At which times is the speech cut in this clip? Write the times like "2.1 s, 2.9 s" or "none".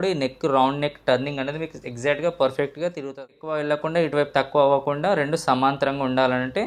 3.2 s